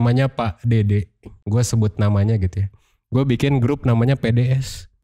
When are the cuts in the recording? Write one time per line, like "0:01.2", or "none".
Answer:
none